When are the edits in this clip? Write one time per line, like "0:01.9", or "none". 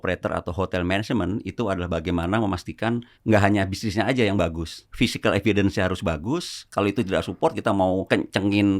0:03.1
0:04.8
0:06.6
0:08.0

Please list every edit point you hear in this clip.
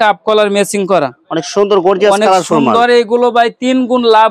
none

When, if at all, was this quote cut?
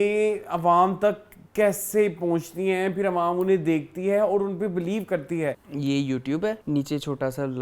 0:05.7
0:06.6

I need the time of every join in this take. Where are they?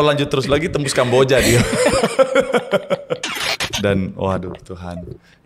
0:03.1

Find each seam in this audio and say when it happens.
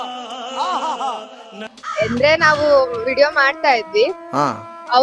0:01.5

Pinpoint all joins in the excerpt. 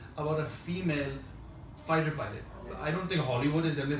none

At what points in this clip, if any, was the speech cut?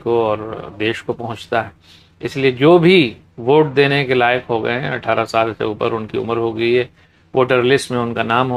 none

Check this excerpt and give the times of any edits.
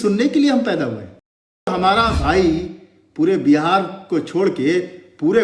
0:01.7

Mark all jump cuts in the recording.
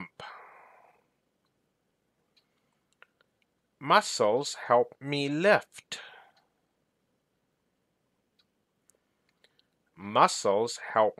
0:01.9
0:07.8

